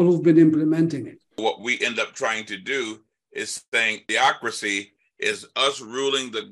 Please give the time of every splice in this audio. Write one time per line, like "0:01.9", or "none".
0:01.4
0:04.0

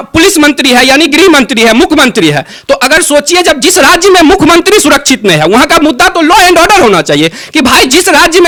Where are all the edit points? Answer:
none

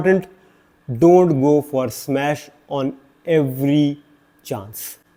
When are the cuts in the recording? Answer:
none

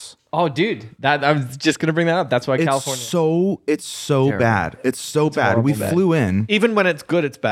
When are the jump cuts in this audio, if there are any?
0:06.4

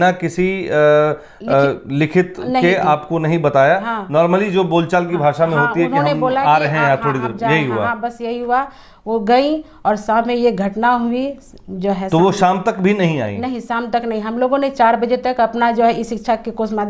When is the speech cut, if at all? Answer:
none

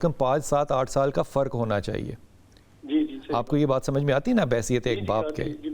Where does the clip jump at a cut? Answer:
none

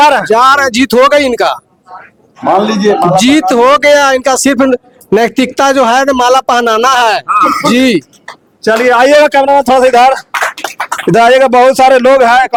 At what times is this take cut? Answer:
none

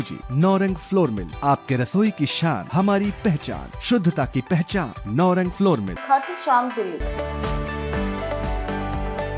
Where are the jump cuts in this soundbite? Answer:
0:07.0

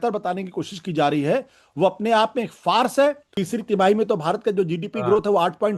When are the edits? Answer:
0:03.3

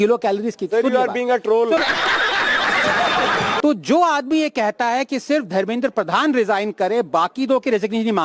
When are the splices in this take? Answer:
0:01.8
0:03.6

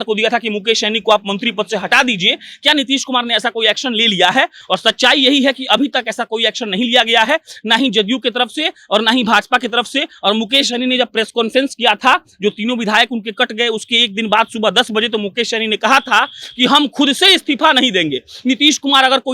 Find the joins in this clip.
none

